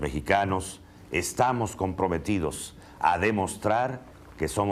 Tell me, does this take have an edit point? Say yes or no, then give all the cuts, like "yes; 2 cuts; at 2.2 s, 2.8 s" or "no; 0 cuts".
no; 0 cuts